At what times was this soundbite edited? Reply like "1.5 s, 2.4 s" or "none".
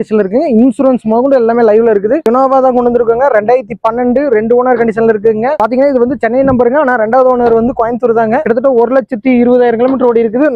none